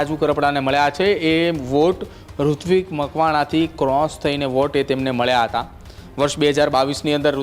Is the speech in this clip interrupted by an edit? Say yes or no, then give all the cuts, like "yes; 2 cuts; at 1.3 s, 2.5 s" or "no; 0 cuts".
no; 0 cuts